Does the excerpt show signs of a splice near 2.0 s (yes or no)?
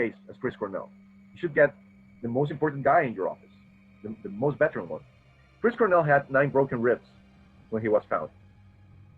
no